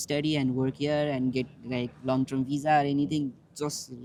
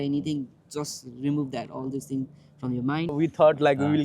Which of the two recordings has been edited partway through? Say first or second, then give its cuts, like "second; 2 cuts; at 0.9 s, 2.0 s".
second; 1 cut; at 3.1 s